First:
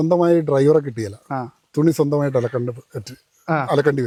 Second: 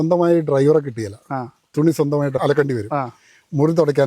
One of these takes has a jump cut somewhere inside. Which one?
second; 1 cut; at 2.4 s

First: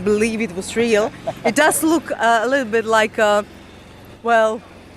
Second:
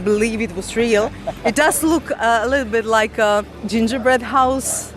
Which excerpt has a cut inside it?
second; 1 cut; at 3.6 s

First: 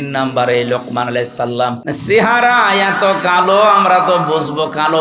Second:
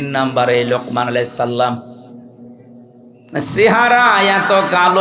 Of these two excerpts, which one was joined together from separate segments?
first; 1 cut; at 1.8 s

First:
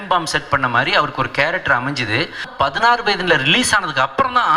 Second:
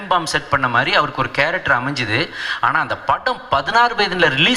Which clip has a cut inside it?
first; 1 cut; at 2.5 s

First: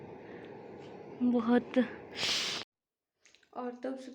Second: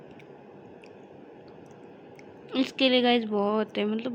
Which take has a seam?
first; 1 cut; at 2.7 s

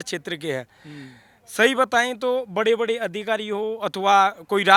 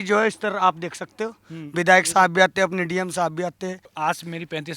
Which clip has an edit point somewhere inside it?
second; 1 cut; at 3.9 s

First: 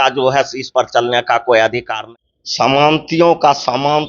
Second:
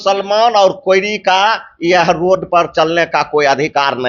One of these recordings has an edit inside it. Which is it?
first; 1 cut; at 1.9 s

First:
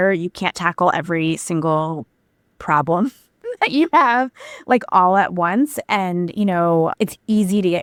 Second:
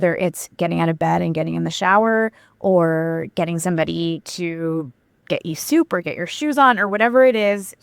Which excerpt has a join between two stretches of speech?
second; 1 cut; at 5.2 s

